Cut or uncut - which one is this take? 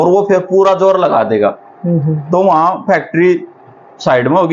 uncut